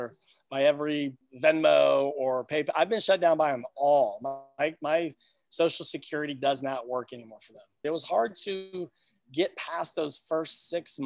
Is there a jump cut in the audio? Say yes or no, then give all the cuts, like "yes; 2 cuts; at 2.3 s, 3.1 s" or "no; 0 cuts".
yes; 1 cut; at 7.8 s